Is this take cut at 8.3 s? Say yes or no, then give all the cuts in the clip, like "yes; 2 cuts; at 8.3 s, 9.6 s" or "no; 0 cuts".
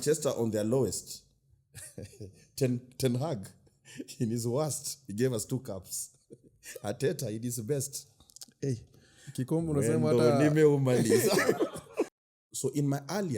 no; 1 cut; at 12.1 s